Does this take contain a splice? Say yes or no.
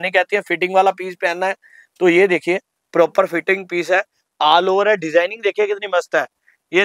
no